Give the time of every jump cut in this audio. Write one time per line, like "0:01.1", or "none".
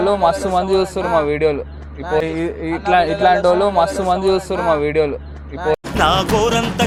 none

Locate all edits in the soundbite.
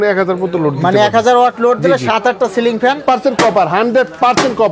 0:03.0

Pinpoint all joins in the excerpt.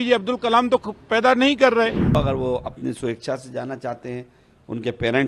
0:02.1

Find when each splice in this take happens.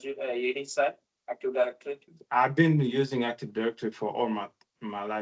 0:02.1

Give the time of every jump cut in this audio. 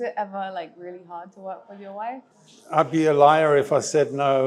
0:02.3

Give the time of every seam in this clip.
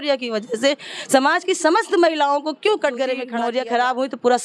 0:03.3

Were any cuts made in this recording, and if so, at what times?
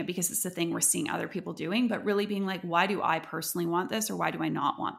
none

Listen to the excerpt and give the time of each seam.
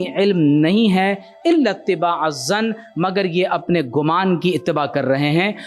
none

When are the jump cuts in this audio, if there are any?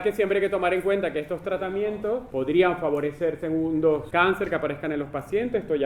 0:02.3
0:04.1

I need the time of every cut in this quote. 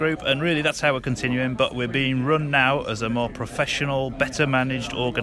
none

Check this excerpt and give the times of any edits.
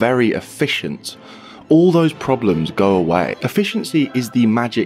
0:03.4

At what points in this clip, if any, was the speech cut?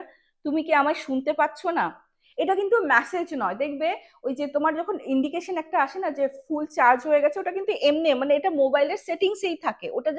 none

